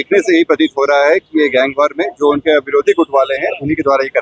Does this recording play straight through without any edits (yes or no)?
yes